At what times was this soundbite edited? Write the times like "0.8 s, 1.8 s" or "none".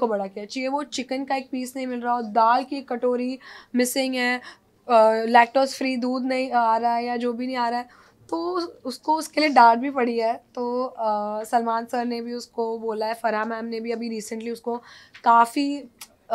none